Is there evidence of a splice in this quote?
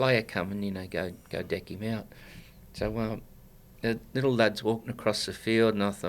no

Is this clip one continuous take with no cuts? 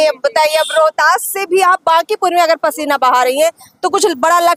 yes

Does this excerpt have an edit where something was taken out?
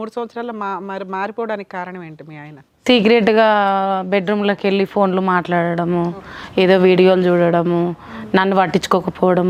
no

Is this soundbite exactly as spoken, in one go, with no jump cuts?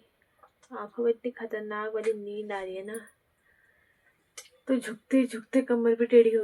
yes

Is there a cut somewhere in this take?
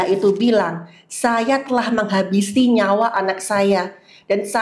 no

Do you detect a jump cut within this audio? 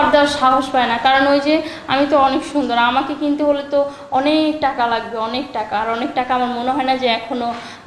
no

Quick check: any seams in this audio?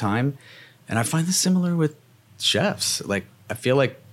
no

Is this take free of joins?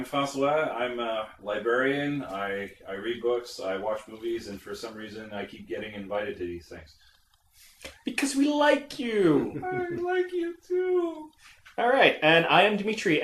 yes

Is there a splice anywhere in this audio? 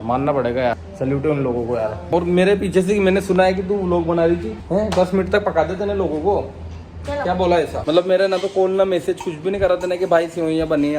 yes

